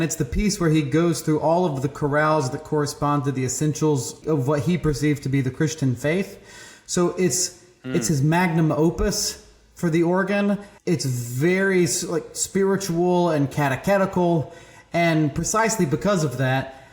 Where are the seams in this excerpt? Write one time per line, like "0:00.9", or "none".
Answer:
0:04.2
0:10.7